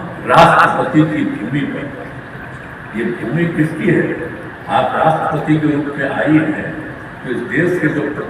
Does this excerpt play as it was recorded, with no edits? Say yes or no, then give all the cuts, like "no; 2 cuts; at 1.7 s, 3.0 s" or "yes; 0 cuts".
yes; 0 cuts